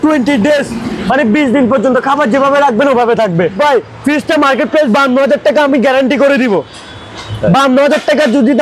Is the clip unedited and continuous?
no; 1 cut; at 3.6 s

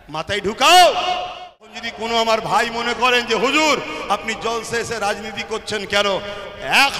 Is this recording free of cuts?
no; 1 cut; at 1.5 s

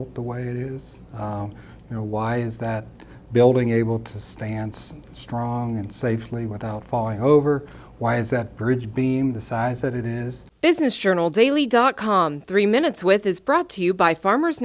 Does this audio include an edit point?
yes; 1 cut; at 10.4 s

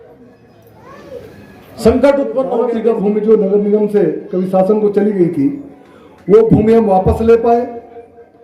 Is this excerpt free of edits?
no; 1 cut; at 2.7 s

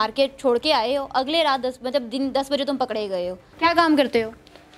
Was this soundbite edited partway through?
yes; 1 cut; at 3.4 s

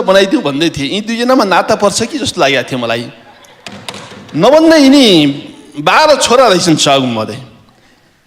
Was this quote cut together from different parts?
no; 0 cuts

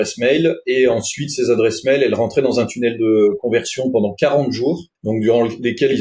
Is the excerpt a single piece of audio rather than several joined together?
no; 1 cut; at 4.9 s

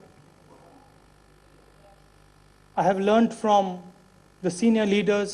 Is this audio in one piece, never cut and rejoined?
yes; 0 cuts

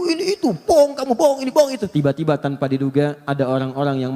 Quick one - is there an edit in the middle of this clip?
yes; 1 cut; at 1.8 s

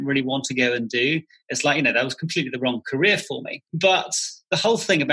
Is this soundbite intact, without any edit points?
no; 1 cut; at 3.6 s

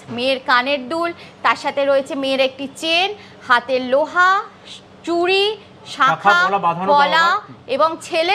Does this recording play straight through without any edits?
yes; 0 cuts

